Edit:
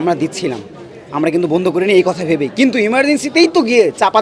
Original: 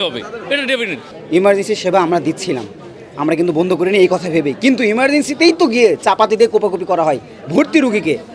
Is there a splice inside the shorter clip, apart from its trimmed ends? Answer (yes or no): no